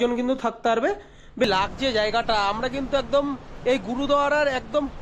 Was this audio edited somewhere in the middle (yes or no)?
yes